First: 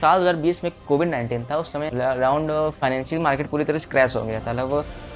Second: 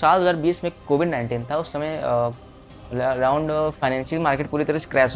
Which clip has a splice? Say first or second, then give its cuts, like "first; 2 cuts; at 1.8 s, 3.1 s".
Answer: first; 1 cut; at 1.9 s